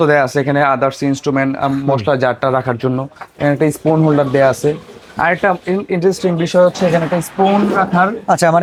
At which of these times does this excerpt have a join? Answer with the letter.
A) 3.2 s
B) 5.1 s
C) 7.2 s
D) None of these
D